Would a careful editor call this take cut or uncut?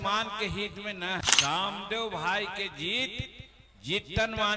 cut